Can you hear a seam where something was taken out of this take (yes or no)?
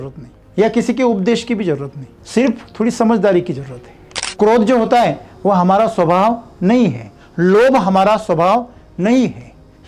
yes